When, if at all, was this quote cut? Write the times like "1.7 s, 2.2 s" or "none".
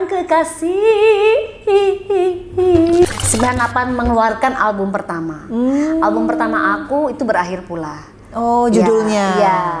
3.0 s